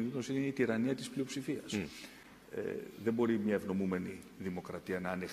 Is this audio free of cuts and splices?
yes; 0 cuts

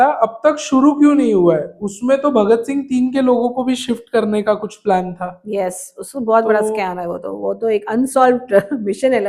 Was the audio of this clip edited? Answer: no; 0 cuts

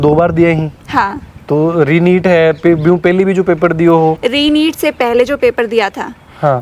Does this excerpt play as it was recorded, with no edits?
yes; 0 cuts

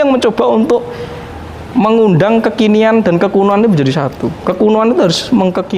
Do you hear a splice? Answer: no; 0 cuts

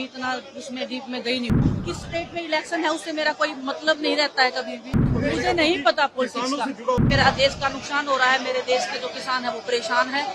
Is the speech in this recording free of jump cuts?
no; 3 cuts; at 1.6 s, 5.0 s, 7.0 s

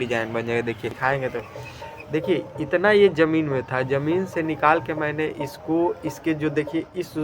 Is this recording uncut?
no; 1 cut; at 0.9 s

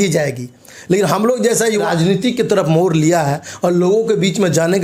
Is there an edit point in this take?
yes; 1 cut; at 1.8 s

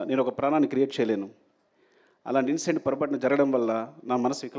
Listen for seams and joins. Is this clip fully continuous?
yes; 0 cuts

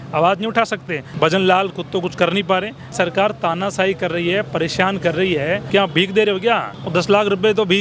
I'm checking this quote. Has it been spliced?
yes; 4 cuts; at 1.0 s, 2.9 s, 5.6 s, 6.8 s

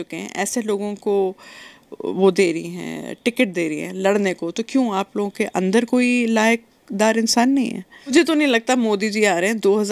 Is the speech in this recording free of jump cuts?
no; 1 cut; at 8.1 s

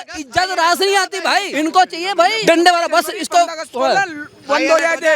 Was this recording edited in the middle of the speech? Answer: yes; 2 cuts; at 1.5 s, 2.4 s

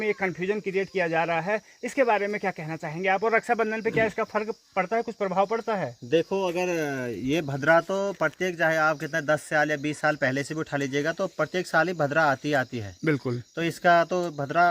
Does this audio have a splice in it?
no; 0 cuts

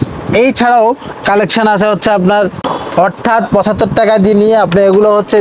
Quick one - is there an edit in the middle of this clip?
yes; 1 cut; at 2.4 s

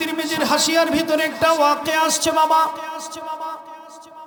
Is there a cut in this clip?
no; 0 cuts

